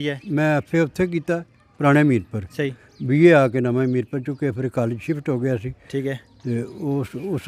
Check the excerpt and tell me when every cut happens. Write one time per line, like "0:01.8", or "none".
none